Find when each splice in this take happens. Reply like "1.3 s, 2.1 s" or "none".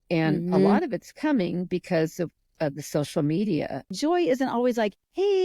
3.9 s